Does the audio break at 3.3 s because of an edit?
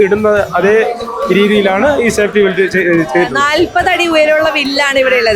yes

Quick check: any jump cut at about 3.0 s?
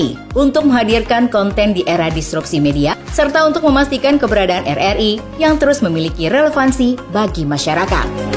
yes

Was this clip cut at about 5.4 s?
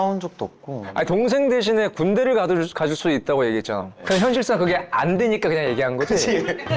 no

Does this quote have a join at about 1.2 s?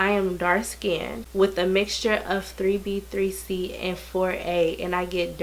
yes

